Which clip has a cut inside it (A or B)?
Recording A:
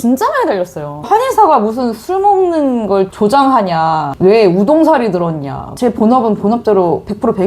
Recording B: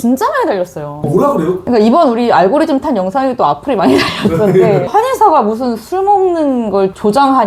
A